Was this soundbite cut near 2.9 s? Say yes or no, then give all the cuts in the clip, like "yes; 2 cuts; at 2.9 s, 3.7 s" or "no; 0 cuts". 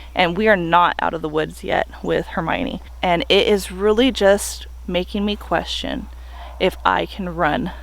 yes; 1 cut; at 2.9 s